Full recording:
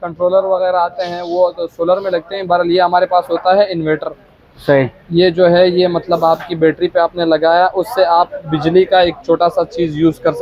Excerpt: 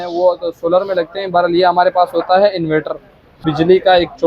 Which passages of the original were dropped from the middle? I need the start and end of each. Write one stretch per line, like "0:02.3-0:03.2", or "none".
0:04.5-0:08.4

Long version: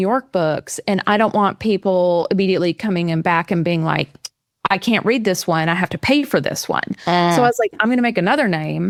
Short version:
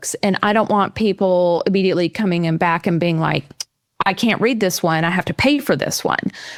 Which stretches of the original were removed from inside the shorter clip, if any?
none

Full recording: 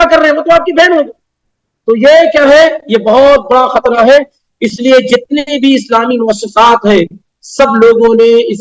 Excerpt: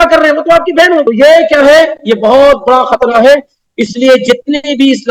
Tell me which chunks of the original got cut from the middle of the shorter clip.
0:01.0-0:01.9

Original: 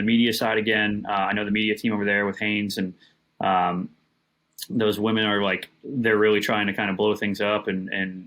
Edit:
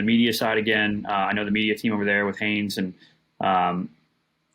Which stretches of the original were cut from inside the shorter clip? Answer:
none

